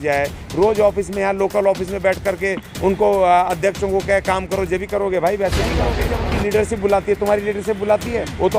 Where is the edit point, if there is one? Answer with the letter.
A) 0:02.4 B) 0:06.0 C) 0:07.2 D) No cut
B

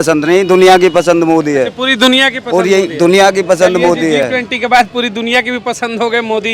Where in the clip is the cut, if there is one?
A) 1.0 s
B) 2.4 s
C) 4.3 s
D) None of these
D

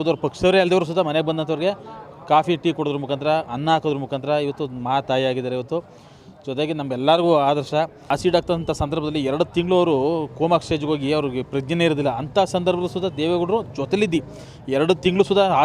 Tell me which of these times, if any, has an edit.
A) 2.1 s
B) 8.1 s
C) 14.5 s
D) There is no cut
B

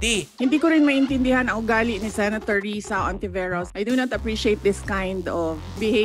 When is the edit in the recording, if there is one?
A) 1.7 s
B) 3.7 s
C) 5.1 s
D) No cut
B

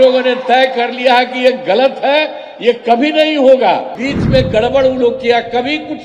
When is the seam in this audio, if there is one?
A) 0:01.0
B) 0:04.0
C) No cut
B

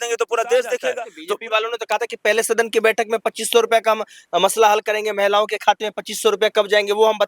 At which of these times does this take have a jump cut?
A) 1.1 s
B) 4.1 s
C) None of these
A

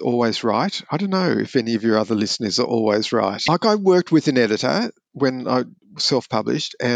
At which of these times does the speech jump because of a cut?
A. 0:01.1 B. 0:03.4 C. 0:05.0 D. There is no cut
B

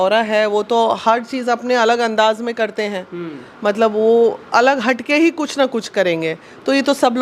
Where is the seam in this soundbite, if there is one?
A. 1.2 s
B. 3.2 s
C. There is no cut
C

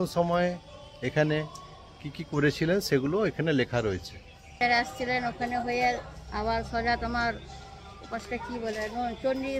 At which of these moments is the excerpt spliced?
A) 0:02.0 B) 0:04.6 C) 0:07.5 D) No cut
B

